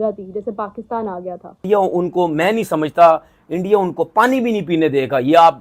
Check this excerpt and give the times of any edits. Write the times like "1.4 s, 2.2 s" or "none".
1.6 s